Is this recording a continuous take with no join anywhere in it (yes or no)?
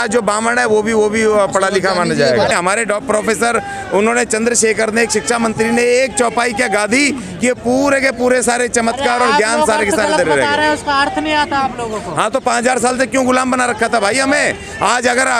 yes